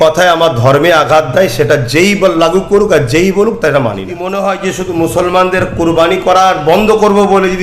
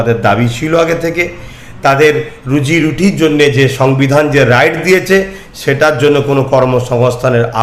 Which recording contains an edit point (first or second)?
first